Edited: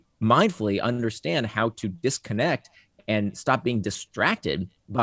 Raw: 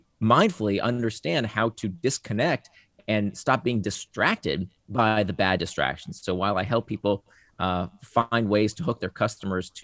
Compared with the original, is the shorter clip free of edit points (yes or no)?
yes